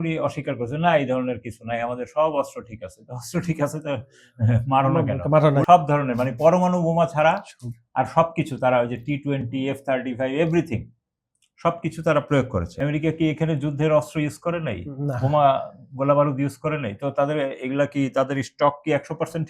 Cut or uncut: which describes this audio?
cut